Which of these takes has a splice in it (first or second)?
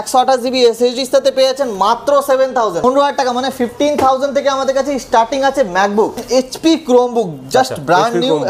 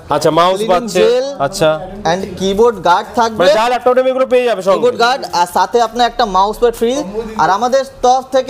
first